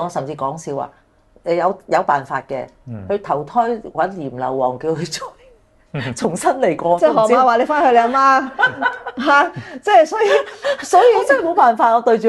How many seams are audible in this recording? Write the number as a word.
zero